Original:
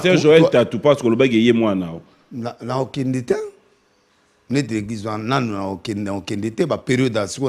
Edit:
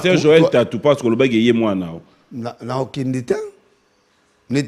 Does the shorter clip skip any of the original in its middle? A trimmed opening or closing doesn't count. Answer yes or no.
no